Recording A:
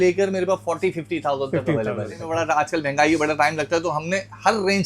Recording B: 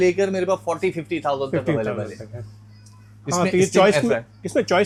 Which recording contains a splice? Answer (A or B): A